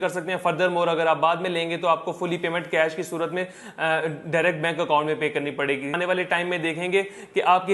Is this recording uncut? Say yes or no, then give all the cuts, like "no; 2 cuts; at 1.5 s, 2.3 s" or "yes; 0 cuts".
no; 1 cut; at 5.9 s